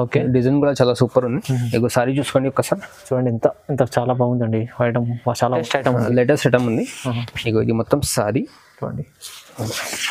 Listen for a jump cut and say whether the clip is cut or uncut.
cut